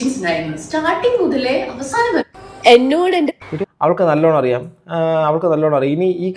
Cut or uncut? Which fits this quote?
cut